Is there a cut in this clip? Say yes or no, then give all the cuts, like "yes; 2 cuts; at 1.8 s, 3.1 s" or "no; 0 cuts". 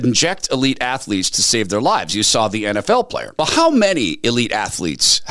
no; 0 cuts